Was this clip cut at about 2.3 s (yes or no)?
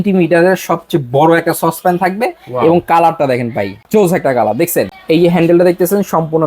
no